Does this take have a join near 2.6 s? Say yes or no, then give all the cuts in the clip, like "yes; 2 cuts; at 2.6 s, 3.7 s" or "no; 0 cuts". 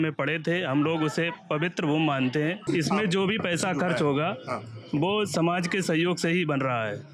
yes; 1 cut; at 2.6 s